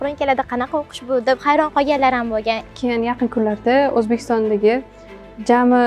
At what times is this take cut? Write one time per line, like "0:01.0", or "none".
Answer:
0:02.6